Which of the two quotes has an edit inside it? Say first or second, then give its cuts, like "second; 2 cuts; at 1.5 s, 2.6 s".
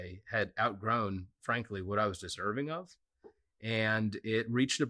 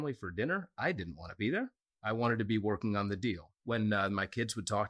second; 1 cut; at 3.5 s